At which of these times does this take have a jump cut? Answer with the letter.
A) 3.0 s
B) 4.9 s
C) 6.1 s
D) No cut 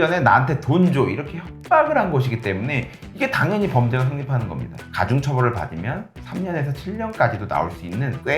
B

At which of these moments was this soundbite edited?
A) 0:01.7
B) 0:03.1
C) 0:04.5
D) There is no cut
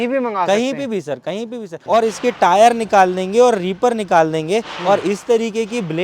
A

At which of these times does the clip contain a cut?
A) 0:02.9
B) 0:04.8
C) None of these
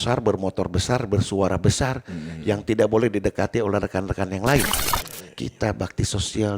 B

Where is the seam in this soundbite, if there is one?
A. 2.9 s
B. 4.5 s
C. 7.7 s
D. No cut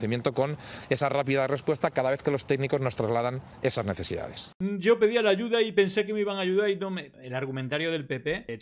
B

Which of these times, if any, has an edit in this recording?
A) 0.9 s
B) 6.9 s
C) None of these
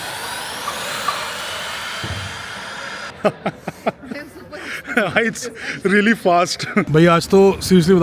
B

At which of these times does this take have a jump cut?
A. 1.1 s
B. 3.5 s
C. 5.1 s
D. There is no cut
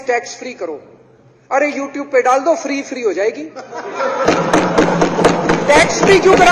D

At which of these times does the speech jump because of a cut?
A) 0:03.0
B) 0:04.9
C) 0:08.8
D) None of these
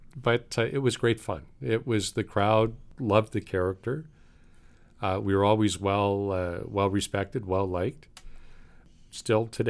D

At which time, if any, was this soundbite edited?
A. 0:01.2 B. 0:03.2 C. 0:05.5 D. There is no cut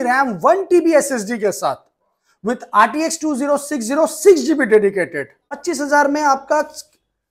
C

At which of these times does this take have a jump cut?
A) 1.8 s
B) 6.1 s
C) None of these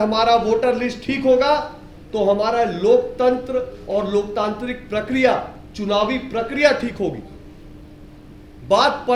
C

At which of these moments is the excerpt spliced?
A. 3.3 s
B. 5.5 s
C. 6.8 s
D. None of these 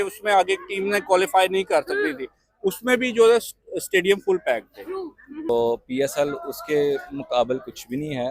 B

